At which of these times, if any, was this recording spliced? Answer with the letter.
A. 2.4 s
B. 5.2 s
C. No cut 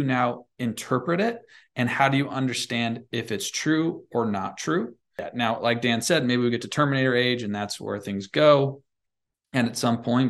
B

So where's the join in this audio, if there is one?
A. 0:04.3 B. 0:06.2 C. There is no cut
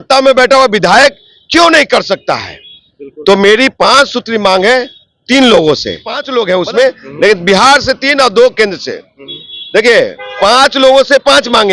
B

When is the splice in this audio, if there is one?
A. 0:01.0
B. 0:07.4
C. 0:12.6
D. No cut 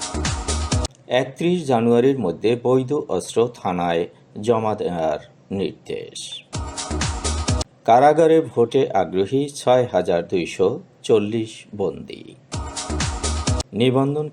A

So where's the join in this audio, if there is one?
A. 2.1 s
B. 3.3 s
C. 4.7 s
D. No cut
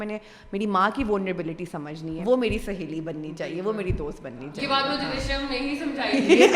A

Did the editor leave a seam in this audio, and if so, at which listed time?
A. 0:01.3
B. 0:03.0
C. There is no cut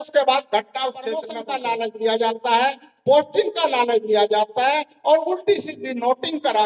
A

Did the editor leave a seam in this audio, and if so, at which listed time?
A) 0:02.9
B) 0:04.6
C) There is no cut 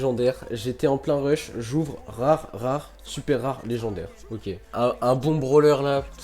B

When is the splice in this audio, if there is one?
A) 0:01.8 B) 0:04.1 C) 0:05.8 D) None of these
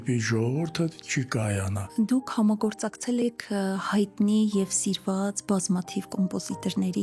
A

